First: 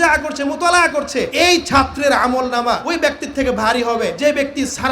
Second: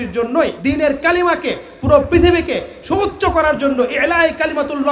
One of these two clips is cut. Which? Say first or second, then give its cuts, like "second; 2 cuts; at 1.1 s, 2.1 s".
first; 3 cuts; at 1.3 s, 2.8 s, 4.1 s